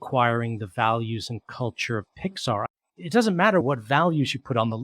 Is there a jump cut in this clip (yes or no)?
yes